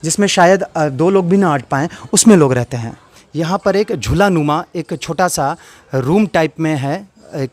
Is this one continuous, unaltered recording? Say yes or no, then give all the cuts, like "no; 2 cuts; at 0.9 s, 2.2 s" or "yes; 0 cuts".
no; 1 cut; at 3.2 s